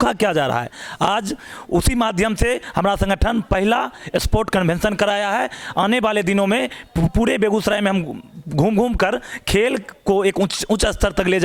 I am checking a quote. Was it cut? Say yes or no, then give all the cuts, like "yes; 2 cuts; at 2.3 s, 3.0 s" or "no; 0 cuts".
no; 0 cuts